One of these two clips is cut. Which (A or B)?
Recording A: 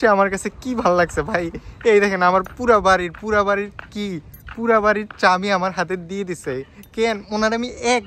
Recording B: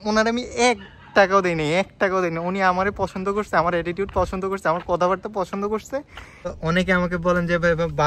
B